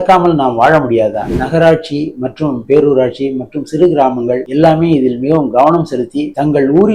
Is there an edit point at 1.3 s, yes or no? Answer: yes